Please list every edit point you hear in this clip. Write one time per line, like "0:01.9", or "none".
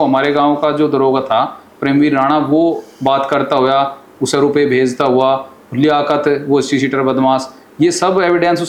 none